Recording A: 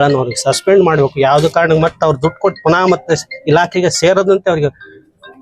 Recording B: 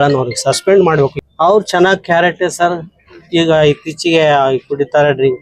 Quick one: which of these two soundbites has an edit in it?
B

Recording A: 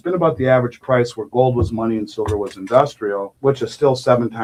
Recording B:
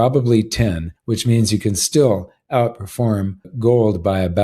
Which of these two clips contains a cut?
B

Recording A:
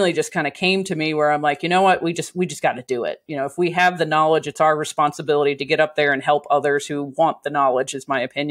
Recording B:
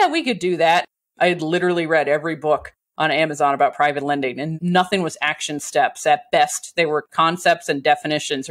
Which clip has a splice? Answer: B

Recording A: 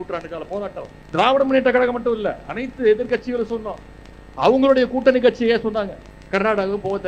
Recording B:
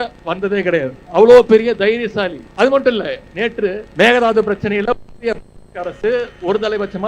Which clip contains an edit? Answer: B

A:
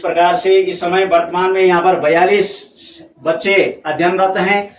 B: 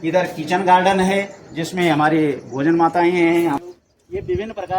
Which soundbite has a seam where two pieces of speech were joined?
B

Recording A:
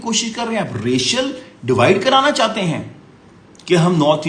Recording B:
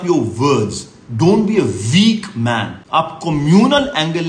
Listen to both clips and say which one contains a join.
B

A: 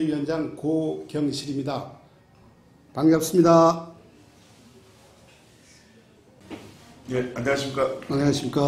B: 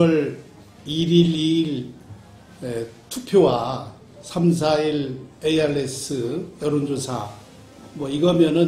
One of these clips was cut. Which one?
A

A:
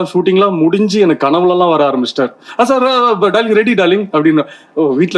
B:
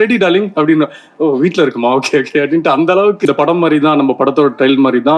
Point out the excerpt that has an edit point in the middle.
B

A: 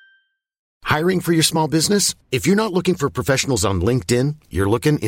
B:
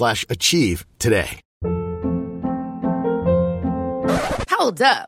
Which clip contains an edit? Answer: B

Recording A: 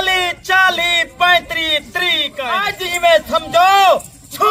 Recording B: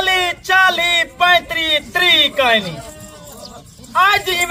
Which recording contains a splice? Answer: A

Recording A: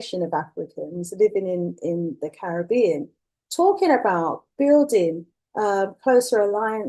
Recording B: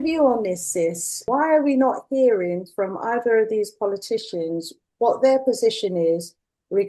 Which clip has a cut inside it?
B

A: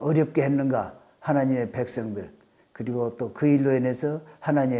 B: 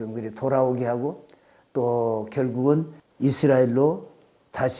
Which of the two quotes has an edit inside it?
B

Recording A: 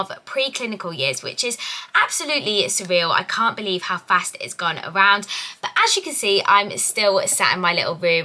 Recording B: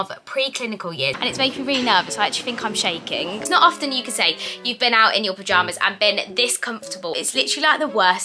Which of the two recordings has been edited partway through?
B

